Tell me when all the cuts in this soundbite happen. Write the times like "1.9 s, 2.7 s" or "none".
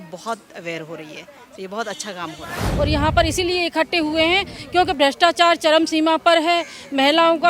2.6 s